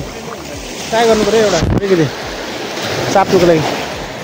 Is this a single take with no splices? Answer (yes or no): yes